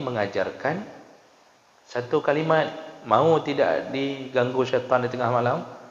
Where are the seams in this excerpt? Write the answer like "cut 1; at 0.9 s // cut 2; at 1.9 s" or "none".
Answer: none